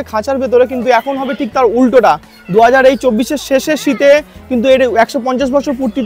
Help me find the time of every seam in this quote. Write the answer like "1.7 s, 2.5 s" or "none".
none